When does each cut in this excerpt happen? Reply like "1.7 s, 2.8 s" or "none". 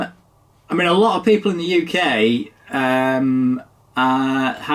none